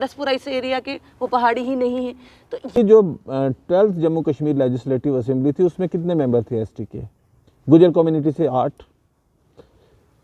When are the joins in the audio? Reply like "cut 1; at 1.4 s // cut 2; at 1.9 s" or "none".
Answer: cut 1; at 2.8 s